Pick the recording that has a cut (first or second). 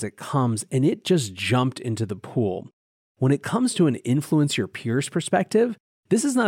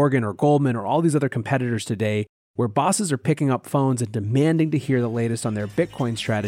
first